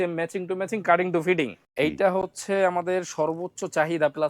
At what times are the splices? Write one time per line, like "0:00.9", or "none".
0:02.1

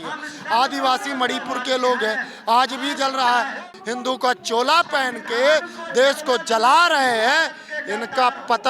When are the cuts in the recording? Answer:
0:03.7

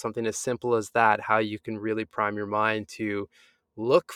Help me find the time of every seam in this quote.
none

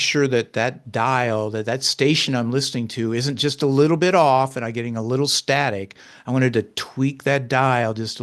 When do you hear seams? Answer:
none

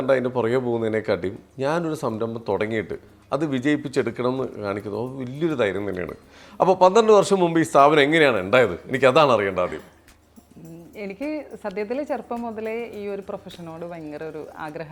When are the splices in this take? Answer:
none

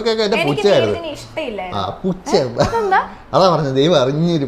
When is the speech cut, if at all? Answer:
none

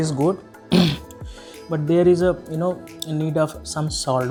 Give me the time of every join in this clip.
none

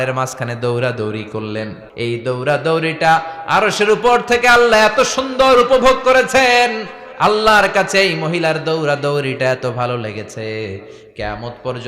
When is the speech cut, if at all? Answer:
0:01.8

